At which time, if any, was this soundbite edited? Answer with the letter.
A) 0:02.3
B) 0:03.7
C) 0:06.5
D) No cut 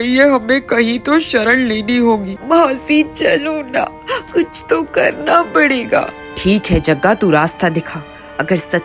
A